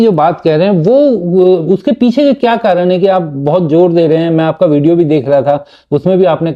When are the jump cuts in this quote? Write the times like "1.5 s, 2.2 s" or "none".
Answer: none